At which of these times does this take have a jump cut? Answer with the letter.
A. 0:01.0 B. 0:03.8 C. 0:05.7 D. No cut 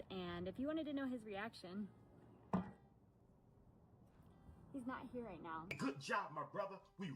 C